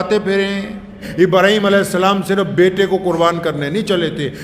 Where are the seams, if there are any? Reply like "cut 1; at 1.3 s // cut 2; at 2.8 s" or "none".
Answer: cut 1; at 1.1 s